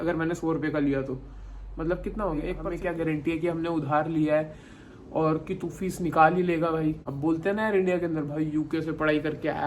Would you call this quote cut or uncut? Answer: cut